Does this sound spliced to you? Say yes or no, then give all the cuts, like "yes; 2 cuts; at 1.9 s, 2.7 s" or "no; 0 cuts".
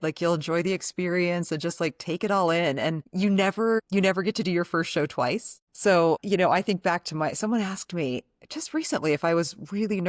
yes; 3 cuts; at 3.0 s, 3.8 s, 5.6 s